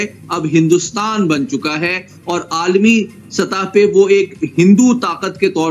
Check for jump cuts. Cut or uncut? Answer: uncut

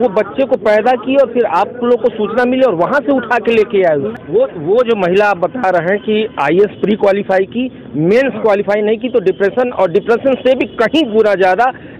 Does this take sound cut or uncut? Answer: cut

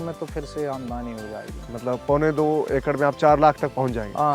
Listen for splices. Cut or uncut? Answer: uncut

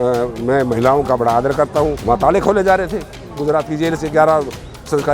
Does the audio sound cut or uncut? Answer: uncut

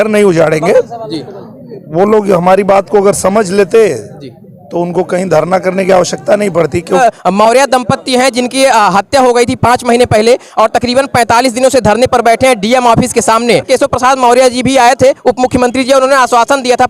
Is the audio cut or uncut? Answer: cut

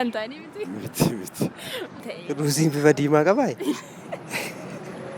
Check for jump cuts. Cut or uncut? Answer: cut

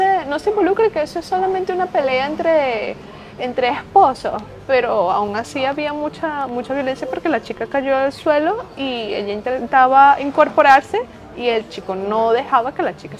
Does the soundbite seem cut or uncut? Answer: uncut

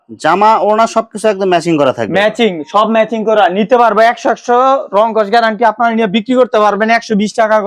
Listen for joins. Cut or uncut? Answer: uncut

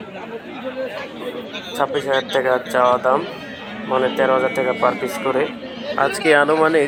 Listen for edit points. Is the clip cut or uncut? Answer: uncut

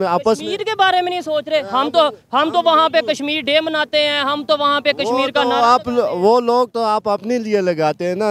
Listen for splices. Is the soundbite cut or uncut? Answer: uncut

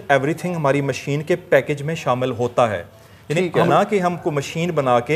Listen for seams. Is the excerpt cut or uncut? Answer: cut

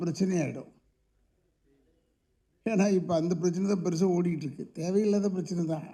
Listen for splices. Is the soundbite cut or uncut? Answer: uncut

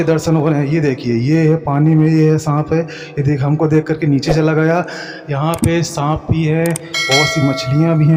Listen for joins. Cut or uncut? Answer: uncut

